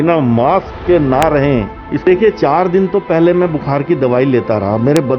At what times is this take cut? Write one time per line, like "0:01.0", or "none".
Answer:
0:02.0

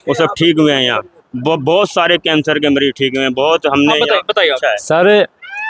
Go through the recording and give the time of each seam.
none

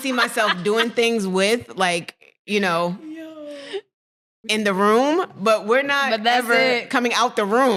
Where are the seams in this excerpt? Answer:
none

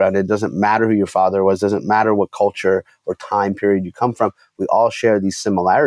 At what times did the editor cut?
none

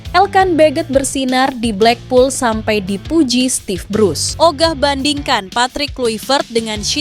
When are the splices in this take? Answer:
0:04.2

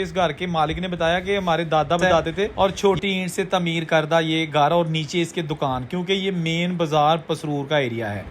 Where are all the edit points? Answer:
0:02.5

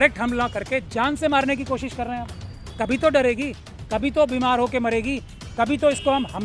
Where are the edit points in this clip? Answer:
none

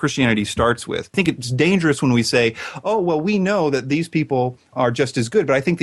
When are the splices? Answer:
0:01.1
0:04.7

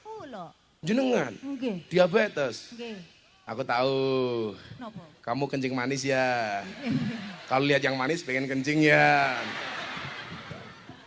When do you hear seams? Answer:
none

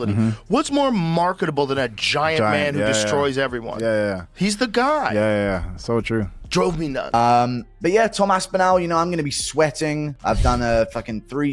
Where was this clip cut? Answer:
0:07.1

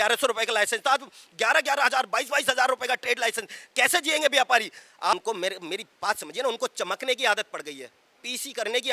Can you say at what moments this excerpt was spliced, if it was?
0:05.1

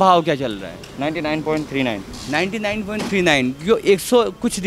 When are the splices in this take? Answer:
none

